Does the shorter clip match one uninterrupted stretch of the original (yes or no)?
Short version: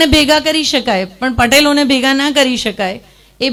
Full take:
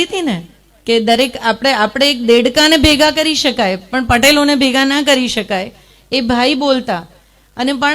yes